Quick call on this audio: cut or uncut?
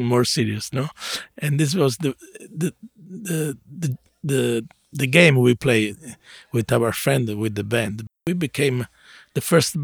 cut